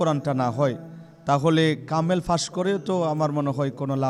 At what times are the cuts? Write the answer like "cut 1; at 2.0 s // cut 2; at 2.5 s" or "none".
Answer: none